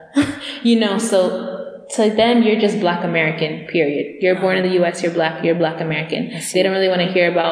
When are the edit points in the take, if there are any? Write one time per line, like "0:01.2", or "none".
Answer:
none